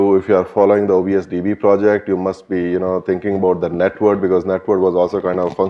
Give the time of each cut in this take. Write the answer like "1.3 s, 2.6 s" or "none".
2.8 s